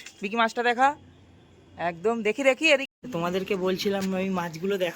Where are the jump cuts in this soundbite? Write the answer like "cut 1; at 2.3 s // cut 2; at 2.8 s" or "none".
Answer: cut 1; at 2.9 s